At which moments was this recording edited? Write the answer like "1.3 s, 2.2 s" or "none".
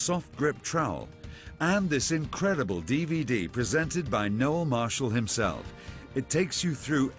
1.5 s